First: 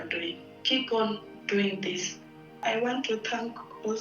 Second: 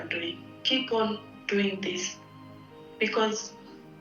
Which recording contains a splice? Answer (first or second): first